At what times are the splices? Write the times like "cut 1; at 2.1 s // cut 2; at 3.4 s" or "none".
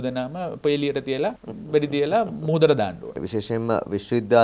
cut 1; at 1.5 s // cut 2; at 3.2 s